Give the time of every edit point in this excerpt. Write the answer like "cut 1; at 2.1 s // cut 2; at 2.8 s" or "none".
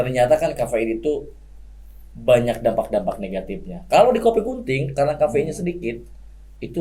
none